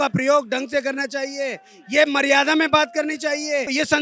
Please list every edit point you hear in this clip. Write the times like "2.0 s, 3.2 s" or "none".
none